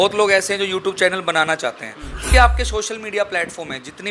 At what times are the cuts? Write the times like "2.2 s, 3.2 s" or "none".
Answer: 2.3 s